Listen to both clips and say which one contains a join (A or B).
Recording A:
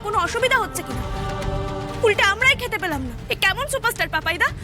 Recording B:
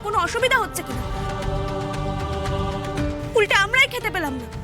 A